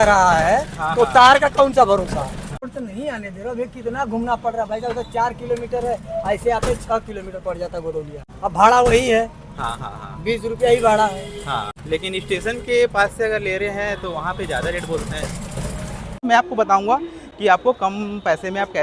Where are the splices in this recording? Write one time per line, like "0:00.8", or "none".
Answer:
0:02.7
0:08.2
0:11.8
0:16.2